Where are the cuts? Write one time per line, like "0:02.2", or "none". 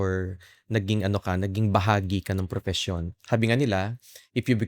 0:03.1